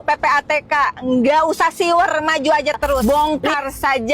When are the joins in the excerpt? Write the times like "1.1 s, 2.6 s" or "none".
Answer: 3.0 s